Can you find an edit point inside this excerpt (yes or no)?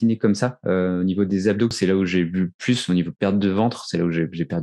yes